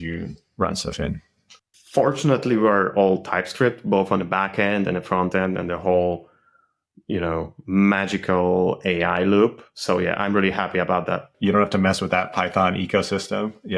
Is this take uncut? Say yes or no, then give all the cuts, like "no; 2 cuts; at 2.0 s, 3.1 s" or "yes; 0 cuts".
yes; 0 cuts